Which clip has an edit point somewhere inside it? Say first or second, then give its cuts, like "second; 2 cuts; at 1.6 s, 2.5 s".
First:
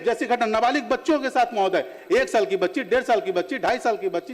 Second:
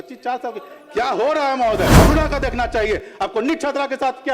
second; 1 cut; at 1.9 s